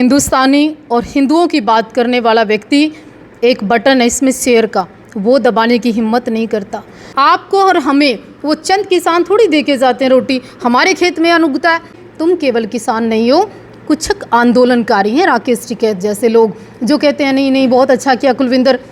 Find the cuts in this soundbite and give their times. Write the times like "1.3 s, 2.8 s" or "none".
7.0 s, 12.0 s